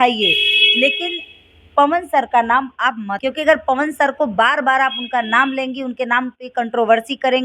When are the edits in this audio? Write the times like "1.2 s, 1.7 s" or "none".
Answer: 3.1 s